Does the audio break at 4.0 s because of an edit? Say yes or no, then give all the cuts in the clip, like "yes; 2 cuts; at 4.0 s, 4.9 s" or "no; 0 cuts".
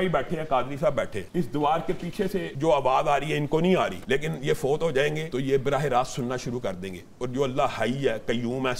yes; 4 cuts; at 1.2 s, 2.5 s, 4.0 s, 5.2 s